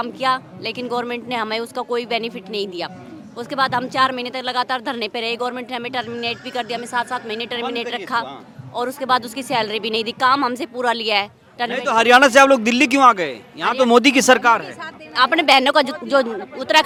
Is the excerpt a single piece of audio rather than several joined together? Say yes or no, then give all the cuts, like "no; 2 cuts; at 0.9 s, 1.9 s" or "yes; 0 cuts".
yes; 0 cuts